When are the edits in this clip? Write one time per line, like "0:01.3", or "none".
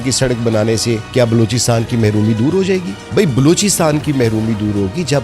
0:01.0
0:03.0